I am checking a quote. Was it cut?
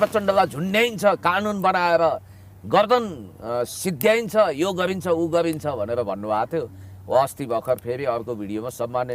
no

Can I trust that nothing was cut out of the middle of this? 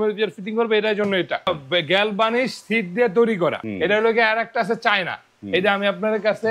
no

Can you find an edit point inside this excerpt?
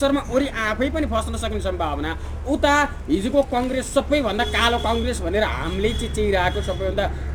no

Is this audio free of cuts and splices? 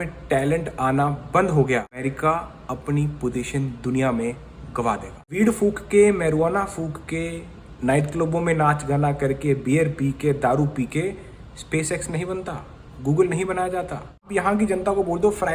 no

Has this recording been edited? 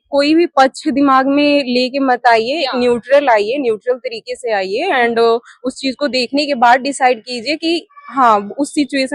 no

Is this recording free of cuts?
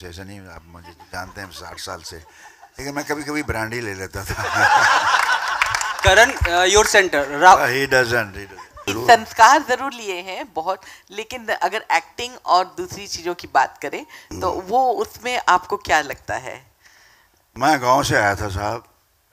no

